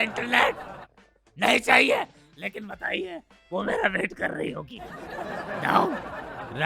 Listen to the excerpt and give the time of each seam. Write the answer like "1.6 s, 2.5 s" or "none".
none